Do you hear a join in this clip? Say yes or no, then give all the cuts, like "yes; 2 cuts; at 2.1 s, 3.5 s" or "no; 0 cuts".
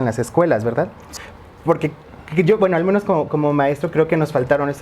yes; 1 cut; at 1.1 s